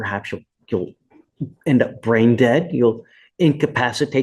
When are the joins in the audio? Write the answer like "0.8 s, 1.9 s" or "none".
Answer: none